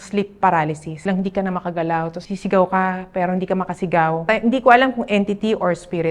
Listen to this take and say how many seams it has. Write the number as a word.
three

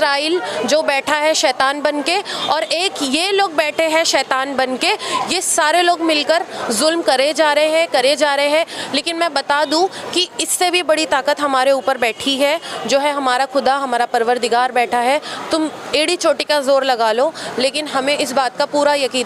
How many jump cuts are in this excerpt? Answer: zero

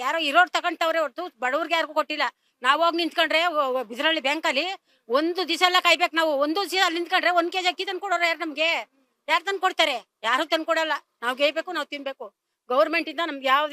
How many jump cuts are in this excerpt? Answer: zero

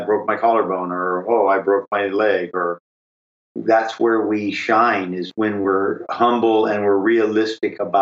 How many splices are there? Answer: one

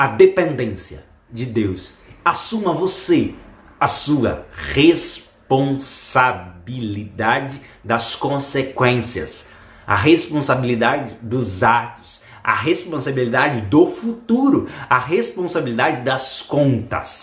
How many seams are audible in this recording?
zero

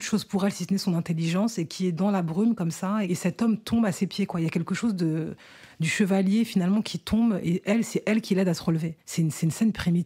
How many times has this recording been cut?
two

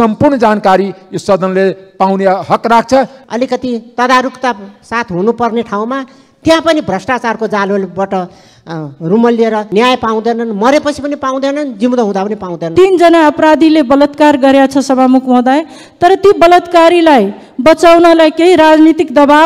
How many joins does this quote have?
three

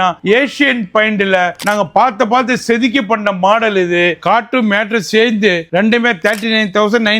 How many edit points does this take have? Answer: one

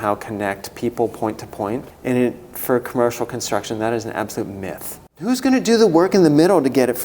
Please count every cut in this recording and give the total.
two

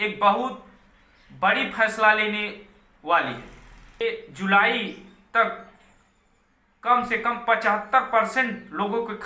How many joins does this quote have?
one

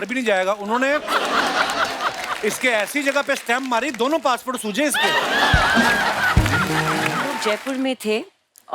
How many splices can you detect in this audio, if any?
one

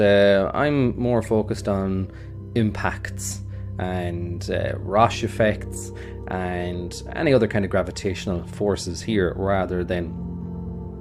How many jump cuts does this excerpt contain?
zero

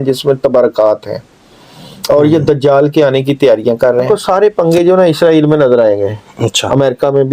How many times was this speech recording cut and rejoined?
one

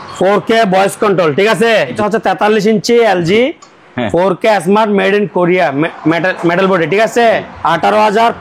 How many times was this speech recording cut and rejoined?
two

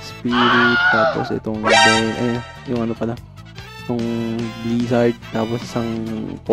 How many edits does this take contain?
zero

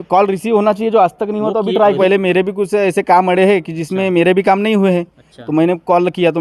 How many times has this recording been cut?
one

